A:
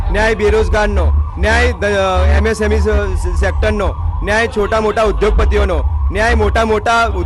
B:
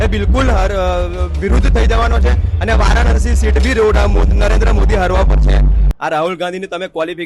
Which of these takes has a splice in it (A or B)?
B